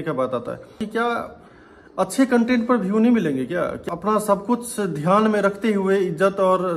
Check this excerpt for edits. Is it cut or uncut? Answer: cut